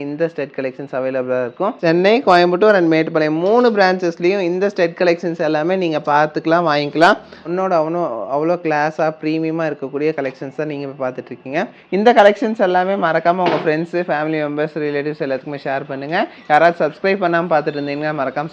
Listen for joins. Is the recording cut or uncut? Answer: cut